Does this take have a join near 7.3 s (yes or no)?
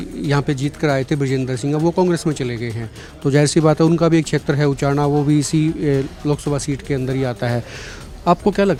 no